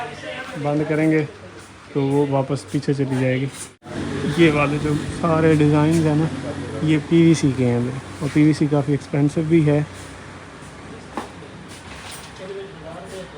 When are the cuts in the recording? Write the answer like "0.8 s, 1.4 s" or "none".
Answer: 3.9 s